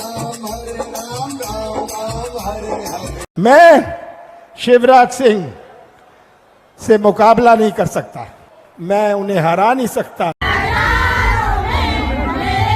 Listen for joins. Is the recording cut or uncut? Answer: cut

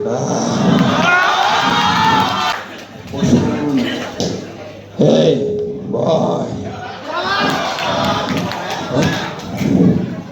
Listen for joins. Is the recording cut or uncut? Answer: cut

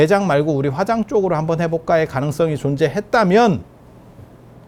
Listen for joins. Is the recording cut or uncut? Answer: uncut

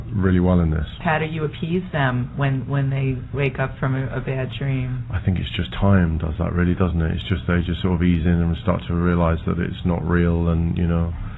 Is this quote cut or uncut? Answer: cut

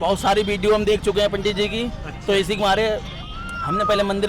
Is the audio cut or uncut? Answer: uncut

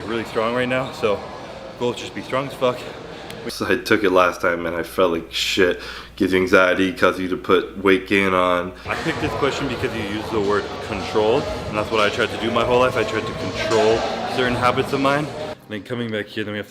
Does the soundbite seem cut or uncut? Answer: cut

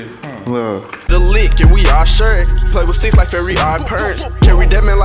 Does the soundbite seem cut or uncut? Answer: cut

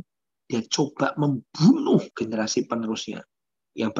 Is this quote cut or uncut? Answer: cut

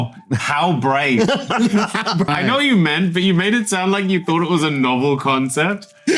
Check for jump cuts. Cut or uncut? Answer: cut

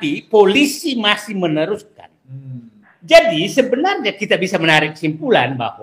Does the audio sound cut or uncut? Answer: cut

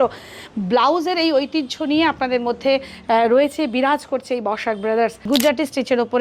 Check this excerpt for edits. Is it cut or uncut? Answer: cut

